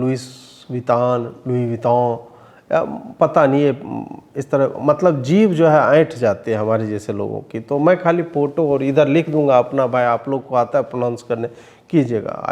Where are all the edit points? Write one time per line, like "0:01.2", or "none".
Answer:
none